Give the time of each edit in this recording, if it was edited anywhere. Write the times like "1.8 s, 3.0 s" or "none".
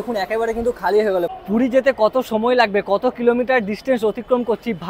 1.4 s